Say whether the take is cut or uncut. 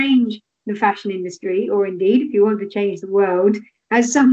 uncut